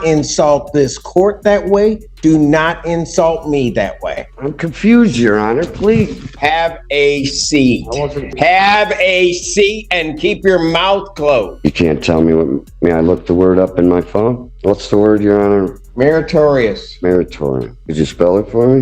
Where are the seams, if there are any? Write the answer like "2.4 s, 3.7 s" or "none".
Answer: 4.3 s, 6.3 s, 8.3 s, 11.5 s, 14.5 s, 15.8 s, 17.8 s